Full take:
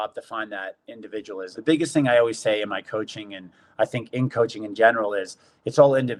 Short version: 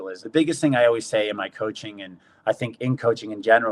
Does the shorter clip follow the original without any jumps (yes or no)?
yes